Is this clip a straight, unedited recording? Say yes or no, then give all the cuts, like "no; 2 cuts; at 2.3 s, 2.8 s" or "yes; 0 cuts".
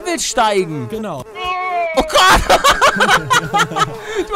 no; 1 cut; at 1.3 s